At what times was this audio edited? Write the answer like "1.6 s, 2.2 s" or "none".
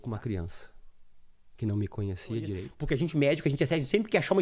2.7 s